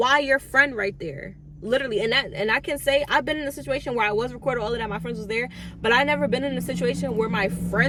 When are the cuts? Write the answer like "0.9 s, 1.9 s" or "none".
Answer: none